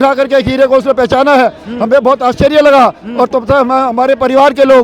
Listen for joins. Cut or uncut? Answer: uncut